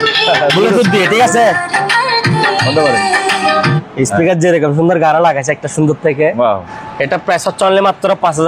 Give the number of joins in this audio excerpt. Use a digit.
1